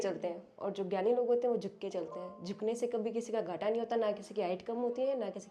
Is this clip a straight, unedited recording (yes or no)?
yes